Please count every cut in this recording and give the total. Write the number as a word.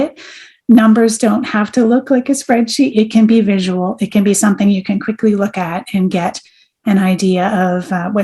one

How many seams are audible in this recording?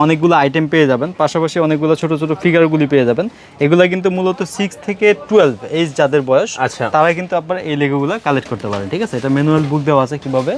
zero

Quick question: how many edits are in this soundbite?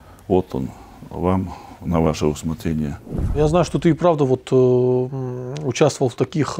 one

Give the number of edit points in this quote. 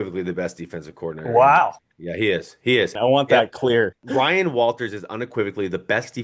two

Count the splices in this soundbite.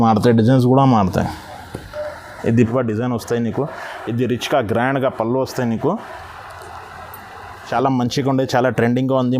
two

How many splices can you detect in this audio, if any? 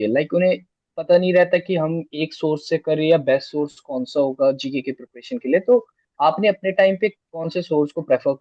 zero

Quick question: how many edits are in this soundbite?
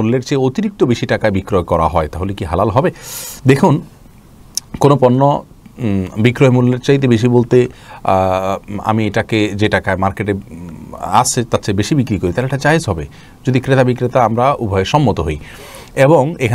zero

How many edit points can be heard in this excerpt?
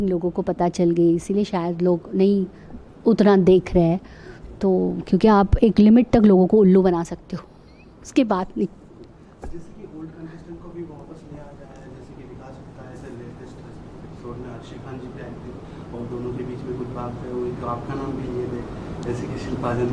zero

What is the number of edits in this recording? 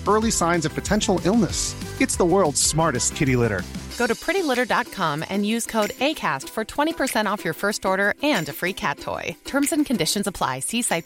zero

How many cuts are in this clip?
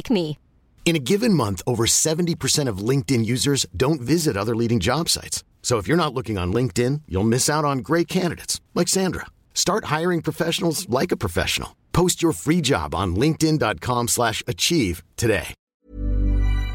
one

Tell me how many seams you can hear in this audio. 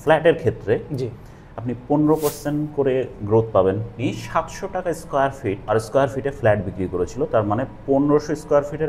two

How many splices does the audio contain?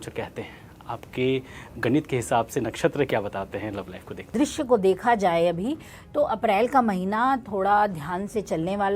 one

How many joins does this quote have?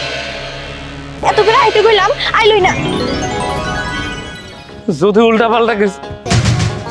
one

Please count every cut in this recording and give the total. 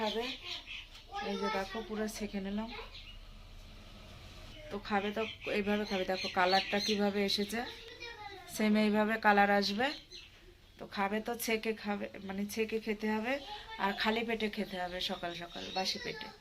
one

